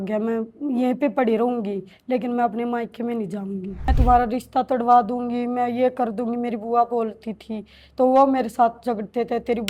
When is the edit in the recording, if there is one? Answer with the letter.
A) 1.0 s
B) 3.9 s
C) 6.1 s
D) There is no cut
B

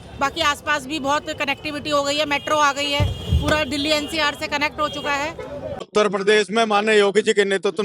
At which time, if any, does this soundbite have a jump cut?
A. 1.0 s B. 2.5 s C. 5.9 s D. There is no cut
C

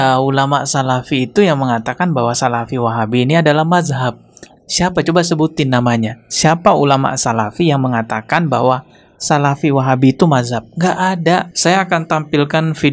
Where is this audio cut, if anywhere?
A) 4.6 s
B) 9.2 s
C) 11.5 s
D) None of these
C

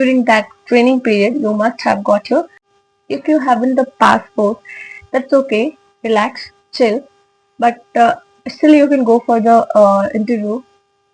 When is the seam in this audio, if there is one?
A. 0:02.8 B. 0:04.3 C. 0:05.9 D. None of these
A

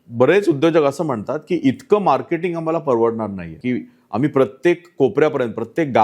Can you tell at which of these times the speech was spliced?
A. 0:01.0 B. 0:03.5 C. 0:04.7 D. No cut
B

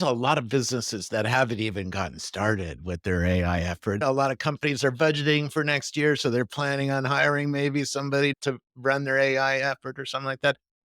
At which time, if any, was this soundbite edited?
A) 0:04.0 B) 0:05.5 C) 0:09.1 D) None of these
A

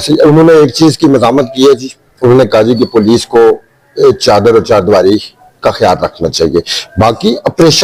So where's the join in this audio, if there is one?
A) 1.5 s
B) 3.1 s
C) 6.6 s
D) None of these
D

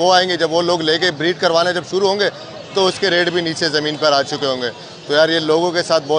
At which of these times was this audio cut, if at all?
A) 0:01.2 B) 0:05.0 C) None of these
C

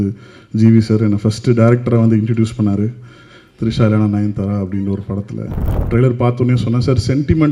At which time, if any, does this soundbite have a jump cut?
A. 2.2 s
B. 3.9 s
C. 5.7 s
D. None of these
C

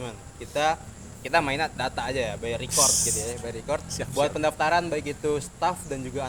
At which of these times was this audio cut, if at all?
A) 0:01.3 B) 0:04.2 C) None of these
C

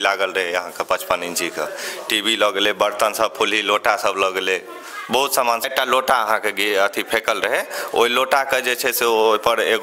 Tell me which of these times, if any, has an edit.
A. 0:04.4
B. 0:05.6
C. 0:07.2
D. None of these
B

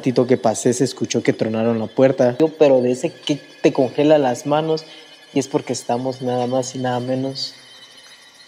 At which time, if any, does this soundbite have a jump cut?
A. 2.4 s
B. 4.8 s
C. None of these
A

